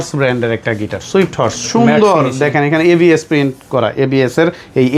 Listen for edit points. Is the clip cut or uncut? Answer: uncut